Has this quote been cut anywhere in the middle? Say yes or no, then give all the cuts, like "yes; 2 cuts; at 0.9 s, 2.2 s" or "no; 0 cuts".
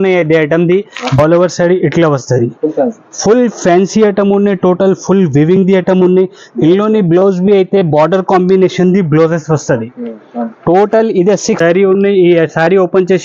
yes; 2 cuts; at 1.2 s, 11.6 s